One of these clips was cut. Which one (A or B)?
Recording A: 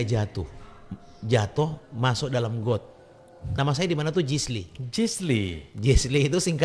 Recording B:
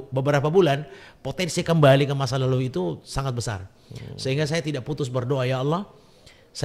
A